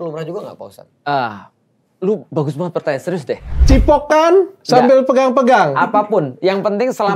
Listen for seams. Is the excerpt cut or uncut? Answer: cut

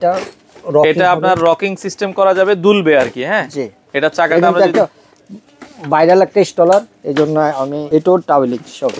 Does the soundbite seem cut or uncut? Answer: cut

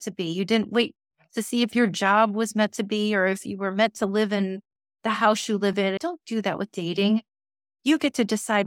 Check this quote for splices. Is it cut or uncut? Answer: cut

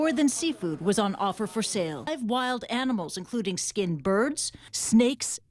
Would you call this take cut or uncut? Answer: cut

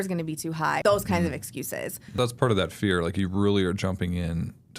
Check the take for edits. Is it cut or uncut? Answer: cut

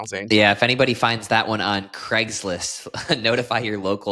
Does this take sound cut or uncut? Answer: uncut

